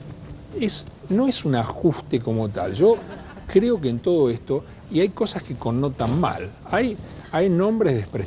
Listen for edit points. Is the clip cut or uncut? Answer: uncut